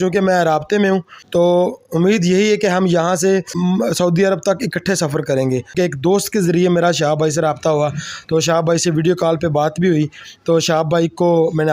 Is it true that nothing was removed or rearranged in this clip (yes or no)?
no